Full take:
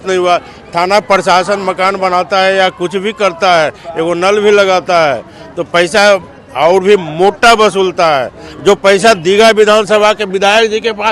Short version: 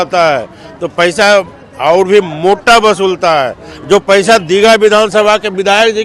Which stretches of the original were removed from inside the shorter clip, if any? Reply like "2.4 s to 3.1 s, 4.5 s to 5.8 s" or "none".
none